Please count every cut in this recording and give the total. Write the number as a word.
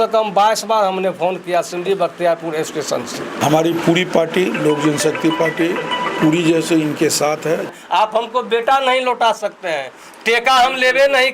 two